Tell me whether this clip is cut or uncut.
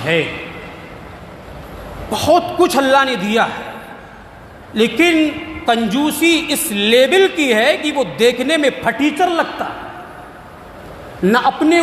uncut